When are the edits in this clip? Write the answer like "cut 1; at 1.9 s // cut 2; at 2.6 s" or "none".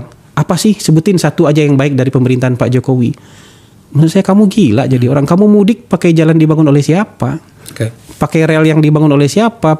none